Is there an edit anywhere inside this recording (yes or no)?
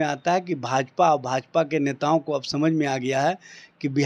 no